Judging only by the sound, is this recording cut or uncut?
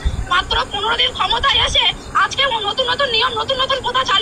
uncut